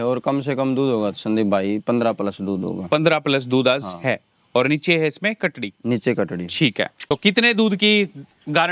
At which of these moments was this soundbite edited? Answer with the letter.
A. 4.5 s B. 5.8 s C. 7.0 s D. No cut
C